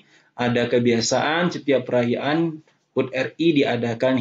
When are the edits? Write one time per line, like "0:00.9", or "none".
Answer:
none